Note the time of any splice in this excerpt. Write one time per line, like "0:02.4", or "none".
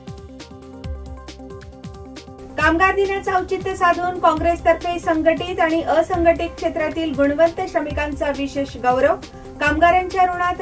0:01.0